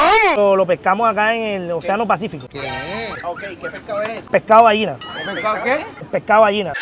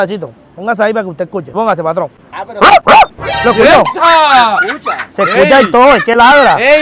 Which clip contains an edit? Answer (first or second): first